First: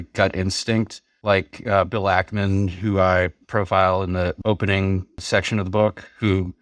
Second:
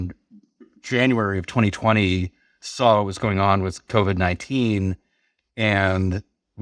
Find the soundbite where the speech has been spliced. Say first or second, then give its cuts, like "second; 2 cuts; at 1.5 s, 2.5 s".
first; 4 cuts; at 1.0 s, 3.4 s, 4.4 s, 5.2 s